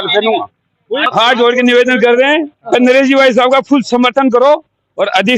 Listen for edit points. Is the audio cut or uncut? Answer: cut